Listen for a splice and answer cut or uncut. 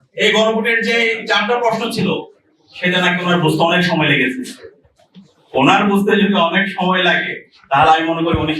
uncut